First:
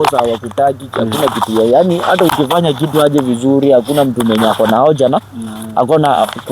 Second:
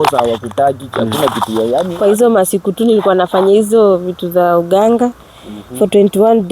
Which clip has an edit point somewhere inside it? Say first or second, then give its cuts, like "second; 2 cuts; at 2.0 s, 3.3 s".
second; 1 cut; at 1.9 s